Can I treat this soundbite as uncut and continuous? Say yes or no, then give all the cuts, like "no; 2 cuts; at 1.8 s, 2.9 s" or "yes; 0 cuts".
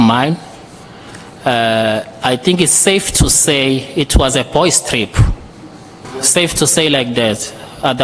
no; 1 cut; at 6.0 s